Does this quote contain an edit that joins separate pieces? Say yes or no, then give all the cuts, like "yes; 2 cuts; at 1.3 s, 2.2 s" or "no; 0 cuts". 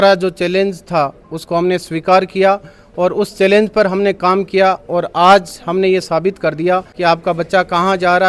yes; 1 cut; at 6.9 s